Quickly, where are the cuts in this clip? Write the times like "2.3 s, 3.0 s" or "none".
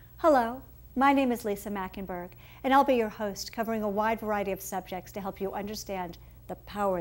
1.9 s